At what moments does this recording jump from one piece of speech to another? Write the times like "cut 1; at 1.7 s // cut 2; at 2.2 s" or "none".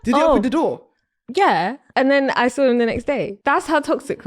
cut 1; at 1.8 s // cut 2; at 3.3 s